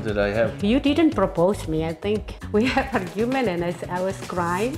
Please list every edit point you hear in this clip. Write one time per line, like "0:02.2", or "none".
0:02.3